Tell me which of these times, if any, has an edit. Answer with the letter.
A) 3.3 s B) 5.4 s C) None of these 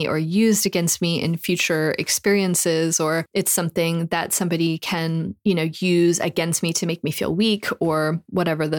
A